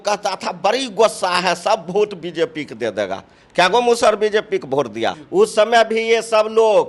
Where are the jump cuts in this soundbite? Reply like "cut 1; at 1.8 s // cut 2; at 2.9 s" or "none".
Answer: cut 1; at 5.2 s

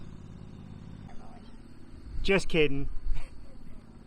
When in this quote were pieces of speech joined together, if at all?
cut 1; at 1.1 s

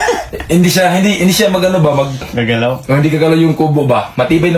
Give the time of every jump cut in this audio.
cut 1; at 2.3 s

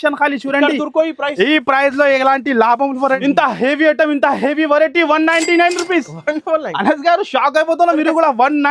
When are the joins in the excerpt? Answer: cut 1; at 3.2 s

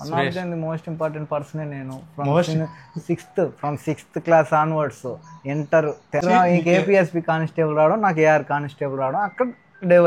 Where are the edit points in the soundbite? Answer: cut 1; at 6.2 s

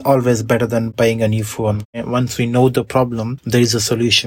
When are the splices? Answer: cut 1; at 1.9 s // cut 2; at 3.3 s

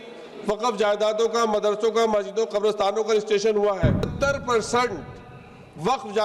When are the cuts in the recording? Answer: cut 1; at 4.1 s

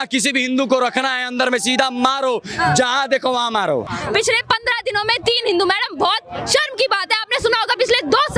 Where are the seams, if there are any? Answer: cut 1; at 3.9 s

